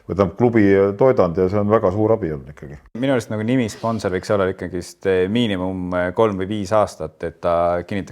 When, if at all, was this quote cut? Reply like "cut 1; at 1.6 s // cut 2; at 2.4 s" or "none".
cut 1; at 3.0 s